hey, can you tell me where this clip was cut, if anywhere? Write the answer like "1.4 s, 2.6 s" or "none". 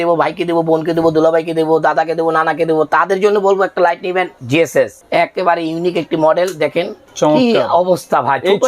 4.6 s, 7.0 s